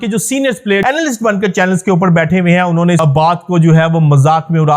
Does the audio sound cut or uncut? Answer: cut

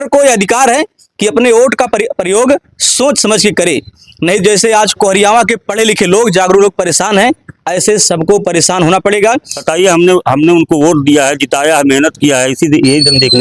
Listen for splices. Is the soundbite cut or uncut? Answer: cut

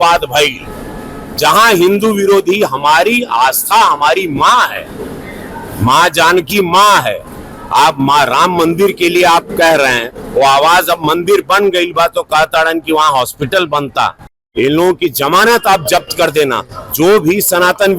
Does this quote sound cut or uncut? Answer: cut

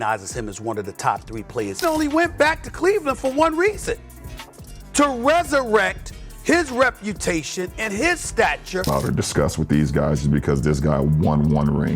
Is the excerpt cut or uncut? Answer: cut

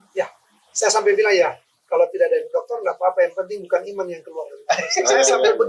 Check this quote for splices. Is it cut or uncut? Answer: uncut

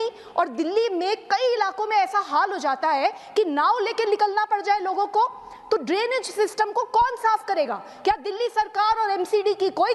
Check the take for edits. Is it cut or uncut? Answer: uncut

